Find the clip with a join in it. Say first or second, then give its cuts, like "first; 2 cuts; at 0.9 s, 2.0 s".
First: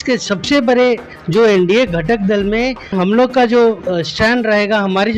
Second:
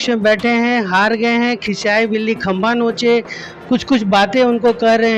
first; 2 cuts; at 1.1 s, 2.9 s